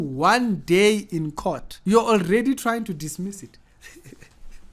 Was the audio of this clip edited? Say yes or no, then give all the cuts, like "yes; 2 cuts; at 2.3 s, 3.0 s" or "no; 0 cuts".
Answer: yes; 1 cut; at 1.7 s